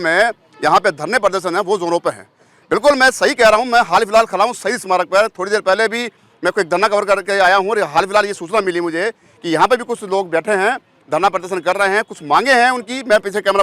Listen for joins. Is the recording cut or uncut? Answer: uncut